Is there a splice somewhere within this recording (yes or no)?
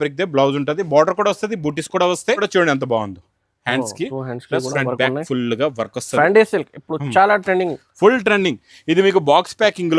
yes